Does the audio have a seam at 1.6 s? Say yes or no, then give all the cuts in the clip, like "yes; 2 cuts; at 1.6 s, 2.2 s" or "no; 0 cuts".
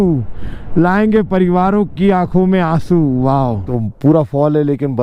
no; 1 cut; at 3.9 s